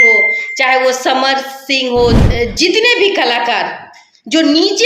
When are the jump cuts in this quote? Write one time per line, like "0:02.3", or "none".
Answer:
0:02.2